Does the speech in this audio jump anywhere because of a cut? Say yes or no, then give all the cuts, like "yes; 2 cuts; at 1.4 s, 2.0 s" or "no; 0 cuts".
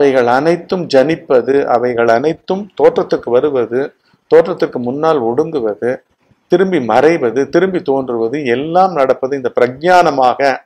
no; 0 cuts